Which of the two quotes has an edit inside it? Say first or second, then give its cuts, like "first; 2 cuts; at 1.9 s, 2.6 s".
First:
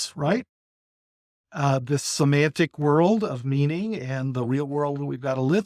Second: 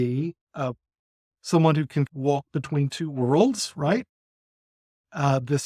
second; 1 cut; at 2.1 s